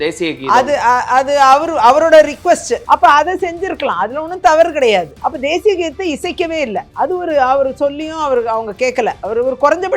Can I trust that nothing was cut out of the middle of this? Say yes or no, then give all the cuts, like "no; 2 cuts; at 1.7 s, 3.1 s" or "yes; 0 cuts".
no; 1 cut; at 2.8 s